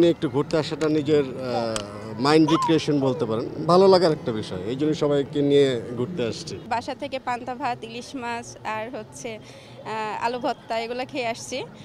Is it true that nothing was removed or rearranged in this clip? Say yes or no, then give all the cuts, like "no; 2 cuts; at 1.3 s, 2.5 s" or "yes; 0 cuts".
yes; 0 cuts